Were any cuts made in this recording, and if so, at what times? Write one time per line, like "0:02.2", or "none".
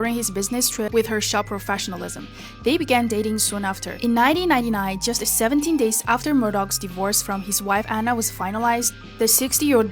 0:01.3
0:04.2